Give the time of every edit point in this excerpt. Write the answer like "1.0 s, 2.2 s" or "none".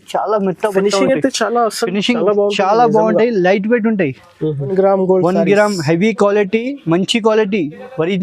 4.7 s

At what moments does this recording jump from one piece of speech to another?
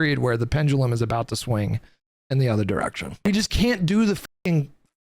3.2 s

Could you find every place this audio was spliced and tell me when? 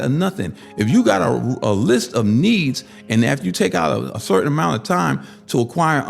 4.1 s

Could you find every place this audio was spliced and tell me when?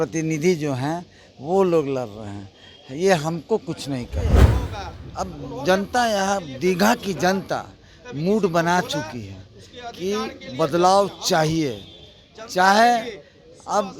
4.5 s

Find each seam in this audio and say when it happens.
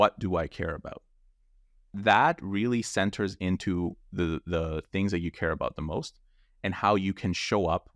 2.0 s

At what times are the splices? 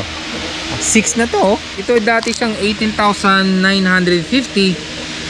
1.7 s

